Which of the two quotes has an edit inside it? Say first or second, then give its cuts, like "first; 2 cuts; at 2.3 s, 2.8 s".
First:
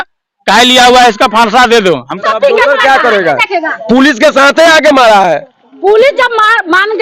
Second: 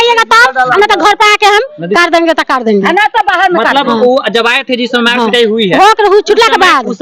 first; 1 cut; at 2.2 s